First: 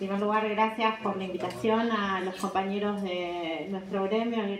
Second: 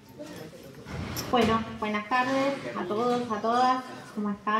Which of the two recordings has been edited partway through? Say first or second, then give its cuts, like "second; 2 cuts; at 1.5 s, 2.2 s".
second; 1 cut; at 1.8 s